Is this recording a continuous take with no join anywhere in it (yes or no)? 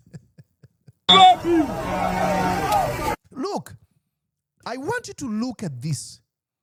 yes